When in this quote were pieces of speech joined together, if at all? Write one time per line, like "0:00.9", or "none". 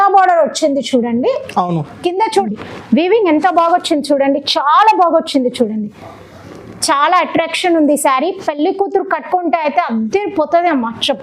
0:02.3